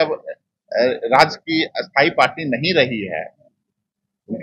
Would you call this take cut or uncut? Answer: uncut